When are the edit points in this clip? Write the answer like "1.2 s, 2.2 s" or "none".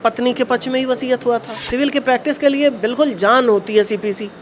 1.6 s